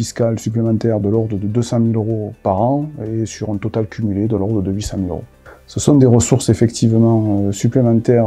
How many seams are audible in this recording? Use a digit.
0